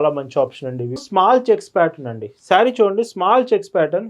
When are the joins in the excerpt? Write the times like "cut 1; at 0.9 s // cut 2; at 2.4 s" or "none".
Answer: cut 1; at 1.0 s